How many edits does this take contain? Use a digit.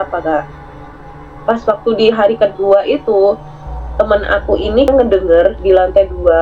1